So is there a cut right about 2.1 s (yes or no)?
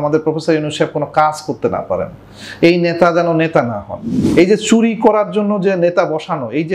no